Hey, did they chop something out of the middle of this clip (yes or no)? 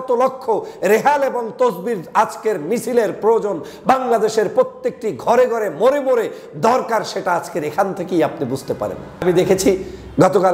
yes